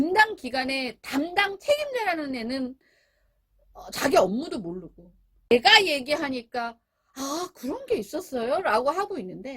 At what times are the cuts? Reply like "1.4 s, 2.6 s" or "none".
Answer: 5.5 s